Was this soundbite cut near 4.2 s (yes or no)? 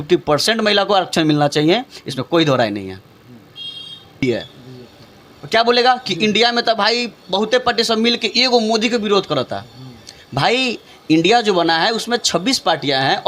yes